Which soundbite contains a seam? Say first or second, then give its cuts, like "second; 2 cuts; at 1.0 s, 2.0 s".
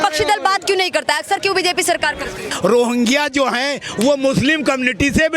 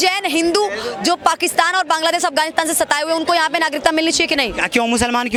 first; 1 cut; at 2.5 s